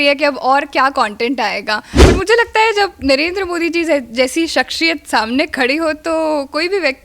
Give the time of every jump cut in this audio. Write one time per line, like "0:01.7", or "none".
0:02.0